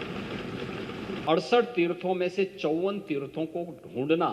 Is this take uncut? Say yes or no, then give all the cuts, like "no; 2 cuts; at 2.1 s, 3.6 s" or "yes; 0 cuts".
no; 1 cut; at 1.2 s